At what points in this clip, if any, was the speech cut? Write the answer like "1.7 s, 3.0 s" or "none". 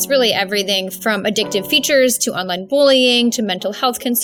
none